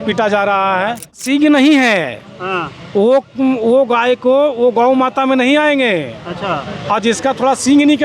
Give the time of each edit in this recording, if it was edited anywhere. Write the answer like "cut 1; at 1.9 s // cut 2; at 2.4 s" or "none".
cut 1; at 1.2 s